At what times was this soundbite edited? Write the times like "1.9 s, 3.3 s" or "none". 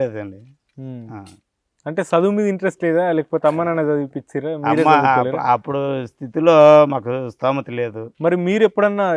8.0 s